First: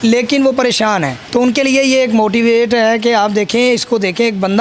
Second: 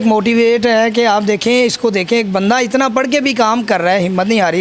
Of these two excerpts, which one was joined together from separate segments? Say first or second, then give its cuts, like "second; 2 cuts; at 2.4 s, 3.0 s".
first; 1 cut; at 1.2 s